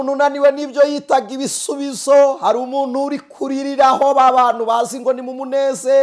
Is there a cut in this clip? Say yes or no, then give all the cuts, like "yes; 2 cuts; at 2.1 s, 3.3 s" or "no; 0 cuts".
no; 0 cuts